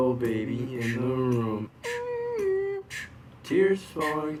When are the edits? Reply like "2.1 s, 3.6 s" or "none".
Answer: none